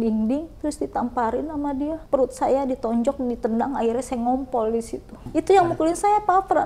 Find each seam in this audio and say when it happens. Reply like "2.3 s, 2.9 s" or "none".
2.0 s, 5.2 s